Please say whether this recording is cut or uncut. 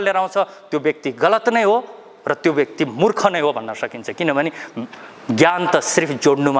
uncut